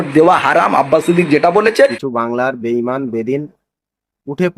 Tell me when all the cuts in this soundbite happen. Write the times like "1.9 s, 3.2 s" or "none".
2.0 s